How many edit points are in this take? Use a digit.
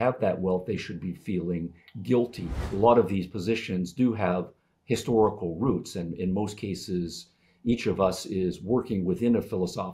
1